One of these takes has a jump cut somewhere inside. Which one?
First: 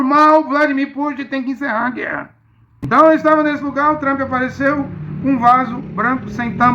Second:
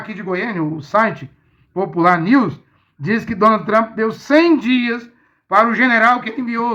first; 1 cut; at 2.7 s

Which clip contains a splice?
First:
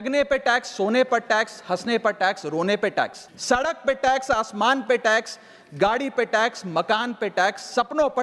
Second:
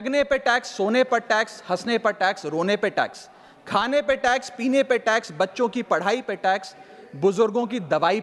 first; 1 cut; at 3.3 s

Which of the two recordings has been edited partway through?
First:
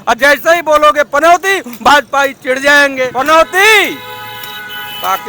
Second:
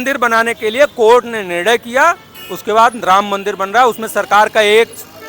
first; 1 cut; at 3.1 s

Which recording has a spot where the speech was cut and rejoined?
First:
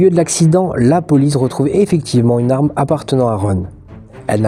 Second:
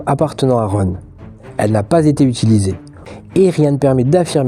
second; 1 cut; at 3.1 s

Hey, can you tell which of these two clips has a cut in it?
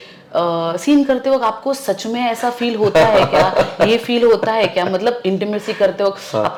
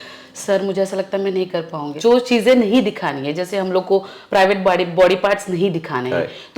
second; 1 cut; at 1.9 s

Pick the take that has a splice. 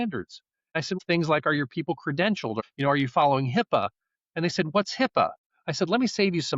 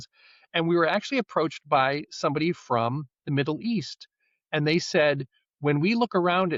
first; 3 cuts; at 0.9 s, 2.6 s, 5.4 s

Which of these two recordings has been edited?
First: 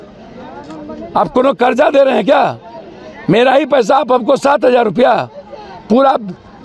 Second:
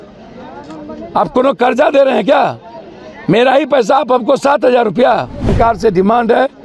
second; 1 cut; at 5.5 s

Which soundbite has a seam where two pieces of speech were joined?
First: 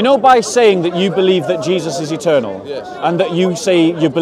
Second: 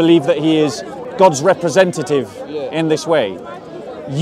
second; 1 cut; at 1.0 s

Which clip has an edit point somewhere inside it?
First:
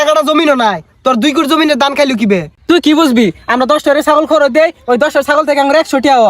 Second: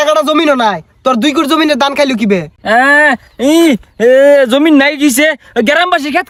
first; 1 cut; at 2.5 s

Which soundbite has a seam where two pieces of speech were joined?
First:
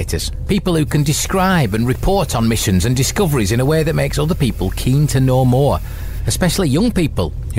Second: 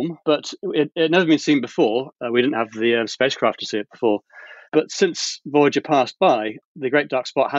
second; 3 cuts; at 2.1 s, 4.6 s, 6.6 s

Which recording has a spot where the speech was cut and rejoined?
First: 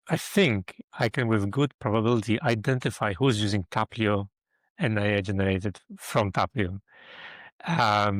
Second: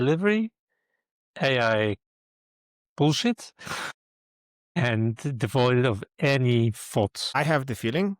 second; 1 cut; at 7.2 s

